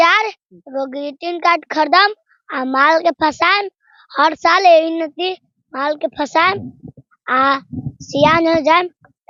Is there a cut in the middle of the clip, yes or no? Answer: no